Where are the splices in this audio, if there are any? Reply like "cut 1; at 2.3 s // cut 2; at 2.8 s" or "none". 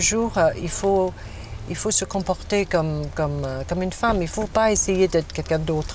cut 1; at 4.3 s